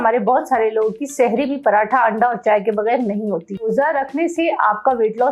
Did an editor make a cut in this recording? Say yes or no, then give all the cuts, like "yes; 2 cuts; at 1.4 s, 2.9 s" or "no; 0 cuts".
yes; 1 cut; at 3.6 s